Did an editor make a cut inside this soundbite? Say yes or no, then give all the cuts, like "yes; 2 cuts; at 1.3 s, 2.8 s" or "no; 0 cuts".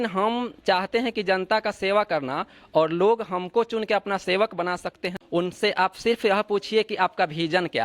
yes; 1 cut; at 5.0 s